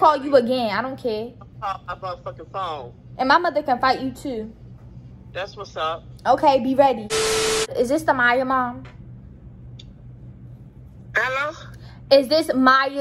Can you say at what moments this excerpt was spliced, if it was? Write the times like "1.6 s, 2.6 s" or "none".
none